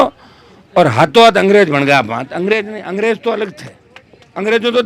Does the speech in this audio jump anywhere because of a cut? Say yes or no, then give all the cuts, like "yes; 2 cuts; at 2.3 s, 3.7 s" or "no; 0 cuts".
no; 0 cuts